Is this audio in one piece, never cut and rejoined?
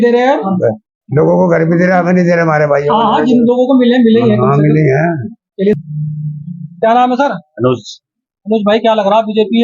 no; 1 cut; at 5.7 s

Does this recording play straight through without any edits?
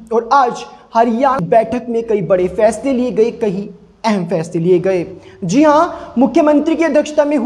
no; 1 cut; at 1.4 s

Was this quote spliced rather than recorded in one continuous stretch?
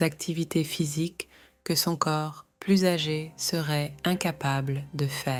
no; 0 cuts

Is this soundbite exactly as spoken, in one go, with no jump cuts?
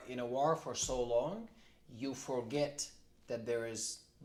yes; 0 cuts

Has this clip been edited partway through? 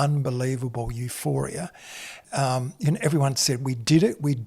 yes; 1 cut; at 2.2 s

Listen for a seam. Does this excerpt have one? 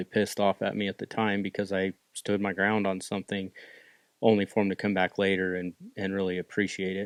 no; 0 cuts

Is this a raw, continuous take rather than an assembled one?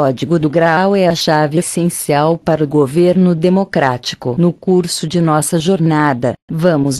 no; 1 cut; at 4.2 s

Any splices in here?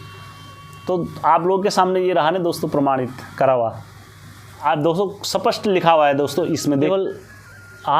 yes; 1 cut; at 6.9 s

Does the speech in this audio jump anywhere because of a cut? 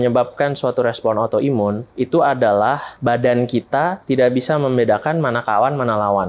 no; 0 cuts

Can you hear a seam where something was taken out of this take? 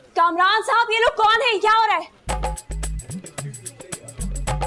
no; 0 cuts

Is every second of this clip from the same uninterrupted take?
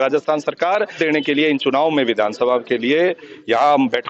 no; 1 cut; at 1.0 s

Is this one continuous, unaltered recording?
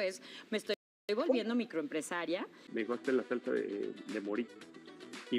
no; 1 cut; at 2.6 s

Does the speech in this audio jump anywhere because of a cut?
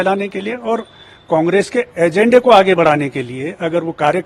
no; 0 cuts

